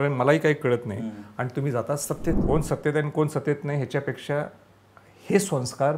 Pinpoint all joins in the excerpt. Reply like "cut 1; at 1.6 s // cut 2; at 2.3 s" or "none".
cut 1; at 2.4 s